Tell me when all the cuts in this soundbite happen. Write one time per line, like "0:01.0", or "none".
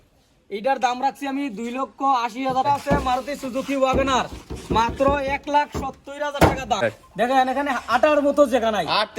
0:02.6
0:06.8